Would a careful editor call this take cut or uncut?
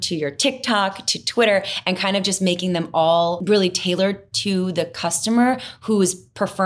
cut